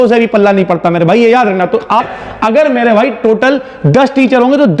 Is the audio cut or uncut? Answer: cut